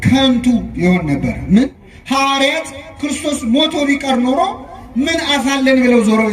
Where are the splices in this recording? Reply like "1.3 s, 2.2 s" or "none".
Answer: 1.9 s